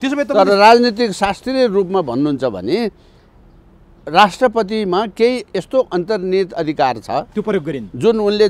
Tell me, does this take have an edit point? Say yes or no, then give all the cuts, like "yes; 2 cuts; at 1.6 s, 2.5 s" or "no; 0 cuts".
no; 0 cuts